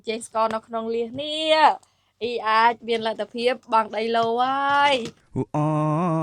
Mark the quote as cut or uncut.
cut